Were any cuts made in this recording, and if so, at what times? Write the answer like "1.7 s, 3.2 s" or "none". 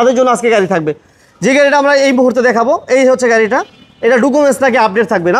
none

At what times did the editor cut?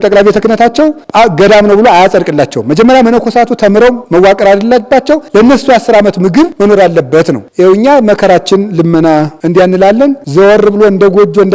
none

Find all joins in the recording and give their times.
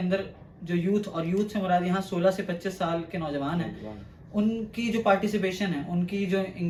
none

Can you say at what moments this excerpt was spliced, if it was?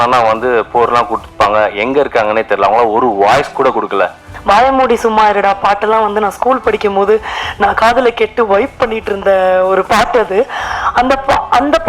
4.3 s

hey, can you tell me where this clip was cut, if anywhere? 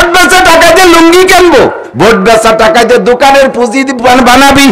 1.8 s

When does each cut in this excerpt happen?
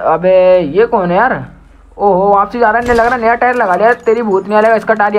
none

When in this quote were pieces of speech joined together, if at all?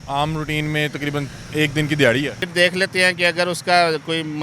2.4 s

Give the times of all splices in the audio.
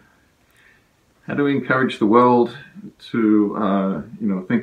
none

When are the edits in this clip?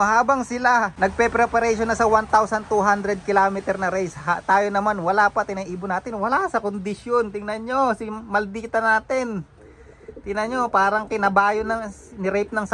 0.9 s

